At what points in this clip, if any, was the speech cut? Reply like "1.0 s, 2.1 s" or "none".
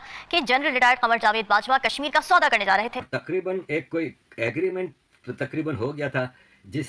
3.0 s